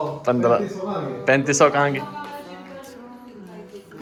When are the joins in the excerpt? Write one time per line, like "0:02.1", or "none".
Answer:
none

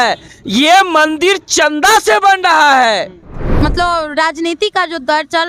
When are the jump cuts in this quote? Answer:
0:03.5

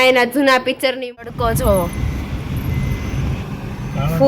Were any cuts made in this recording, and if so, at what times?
0:01.0

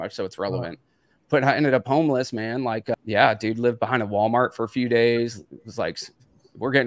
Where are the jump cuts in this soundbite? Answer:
0:03.0

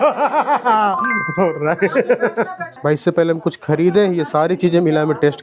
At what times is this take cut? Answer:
none

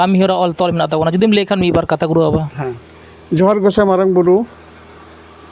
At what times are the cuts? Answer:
none

